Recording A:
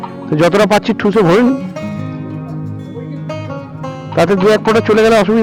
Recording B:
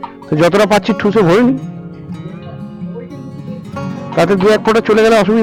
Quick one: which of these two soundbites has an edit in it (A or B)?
A